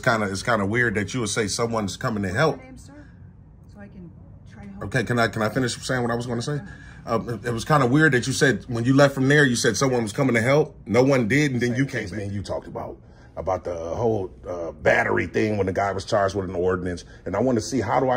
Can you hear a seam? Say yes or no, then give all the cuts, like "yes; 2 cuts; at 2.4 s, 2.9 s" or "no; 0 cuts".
yes; 1 cut; at 12.0 s